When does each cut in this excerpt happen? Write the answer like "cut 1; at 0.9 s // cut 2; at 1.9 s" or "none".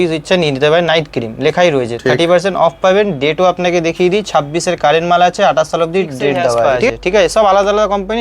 cut 1; at 6.8 s